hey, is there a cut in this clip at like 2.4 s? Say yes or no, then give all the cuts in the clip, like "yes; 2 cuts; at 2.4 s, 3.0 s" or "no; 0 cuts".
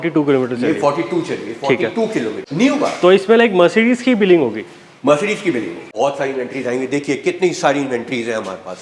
yes; 2 cuts; at 2.4 s, 5.8 s